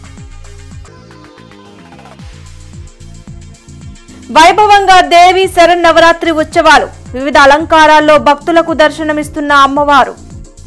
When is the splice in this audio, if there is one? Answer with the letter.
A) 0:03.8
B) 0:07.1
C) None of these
A